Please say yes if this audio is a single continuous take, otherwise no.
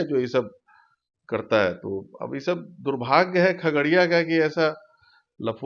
yes